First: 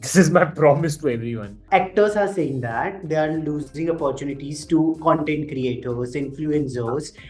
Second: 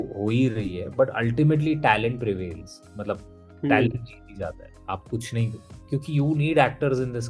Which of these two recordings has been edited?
first; 1 cut; at 1.6 s

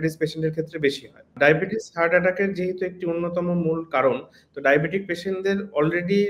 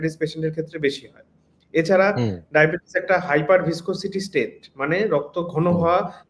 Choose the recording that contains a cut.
first; 1 cut; at 1.3 s

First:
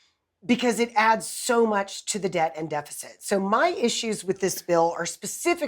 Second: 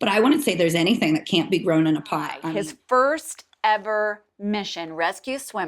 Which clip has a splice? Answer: second; 1 cut; at 2.4 s

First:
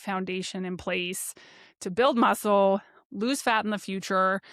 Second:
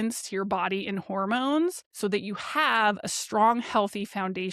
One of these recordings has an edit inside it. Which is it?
second; 1 cut; at 1.9 s

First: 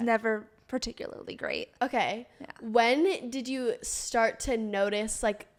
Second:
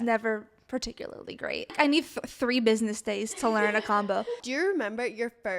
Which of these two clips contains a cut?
second; 2 cuts; at 1.7 s, 4.4 s

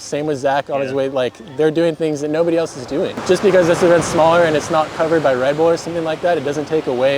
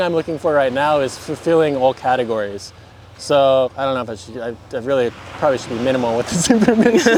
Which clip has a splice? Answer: first; 1 cut; at 3.2 s

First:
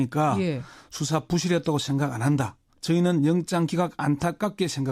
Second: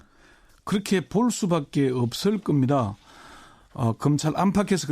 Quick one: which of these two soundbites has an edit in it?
first; 1 cut; at 1.8 s

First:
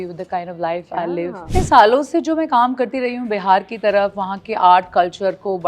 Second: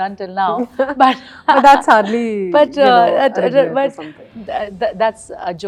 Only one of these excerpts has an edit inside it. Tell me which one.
first; 1 cut; at 1.5 s

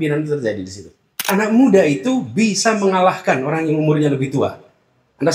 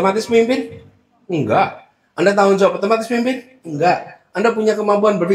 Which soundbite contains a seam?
first; 1 cut; at 1.3 s

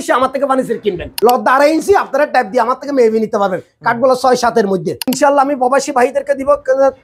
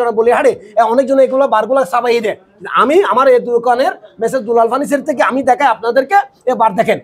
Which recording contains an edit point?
first; 2 cuts; at 1.1 s, 5.1 s

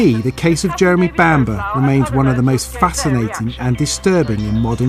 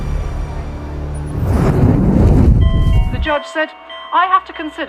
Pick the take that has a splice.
first; 1 cut; at 4.0 s

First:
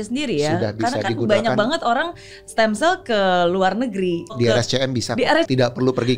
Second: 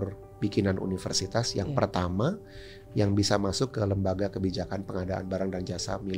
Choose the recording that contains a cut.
first; 2 cuts; at 4.3 s, 5.5 s

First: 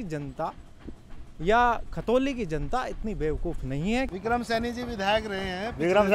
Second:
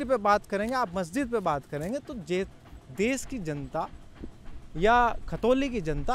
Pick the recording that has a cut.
first; 1 cut; at 4.1 s

